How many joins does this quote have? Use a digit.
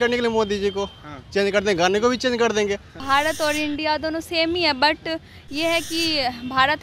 1